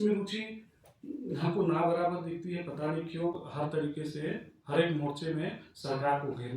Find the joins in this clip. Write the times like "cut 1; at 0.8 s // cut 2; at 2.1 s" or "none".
cut 1; at 3.4 s